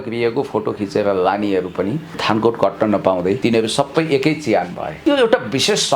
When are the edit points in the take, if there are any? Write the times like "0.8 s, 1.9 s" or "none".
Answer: 2.1 s, 3.4 s, 4.8 s